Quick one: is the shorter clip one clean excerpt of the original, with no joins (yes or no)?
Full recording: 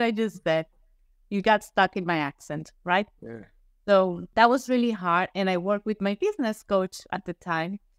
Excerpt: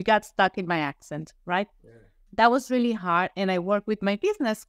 no